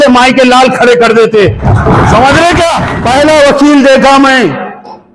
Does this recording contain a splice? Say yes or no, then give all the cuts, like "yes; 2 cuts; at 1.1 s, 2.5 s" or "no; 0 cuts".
yes; 1 cut; at 2.9 s